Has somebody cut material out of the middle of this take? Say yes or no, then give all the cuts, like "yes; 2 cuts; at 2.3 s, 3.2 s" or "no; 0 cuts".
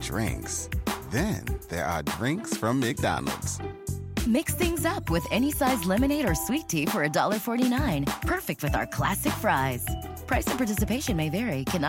no; 0 cuts